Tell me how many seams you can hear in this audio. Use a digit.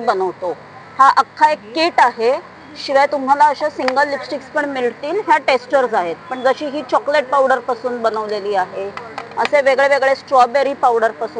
0